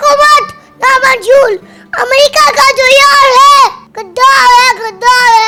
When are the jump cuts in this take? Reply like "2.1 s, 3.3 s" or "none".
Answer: none